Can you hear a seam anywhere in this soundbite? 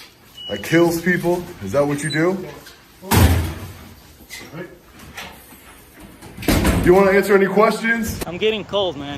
yes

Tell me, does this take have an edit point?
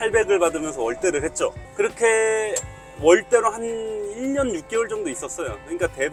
no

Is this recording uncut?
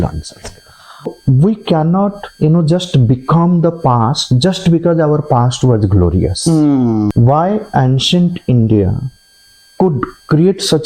no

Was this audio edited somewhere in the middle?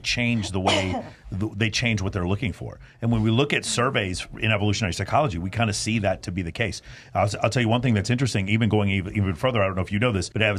no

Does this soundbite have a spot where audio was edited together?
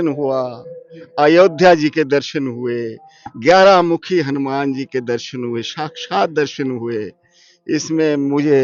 no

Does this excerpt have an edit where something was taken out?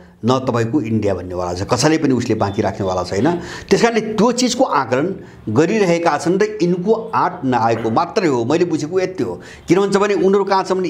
no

